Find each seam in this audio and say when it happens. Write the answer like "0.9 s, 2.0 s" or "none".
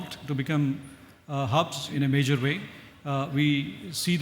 1.9 s